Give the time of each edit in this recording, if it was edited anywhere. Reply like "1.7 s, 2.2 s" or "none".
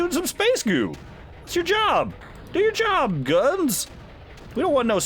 none